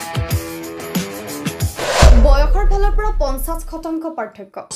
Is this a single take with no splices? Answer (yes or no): yes